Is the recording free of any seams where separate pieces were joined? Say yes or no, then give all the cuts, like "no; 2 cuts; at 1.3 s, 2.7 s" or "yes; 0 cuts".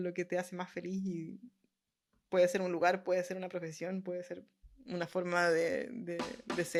yes; 0 cuts